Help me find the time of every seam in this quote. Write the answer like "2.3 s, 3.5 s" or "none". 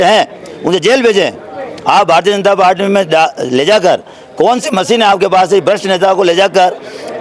none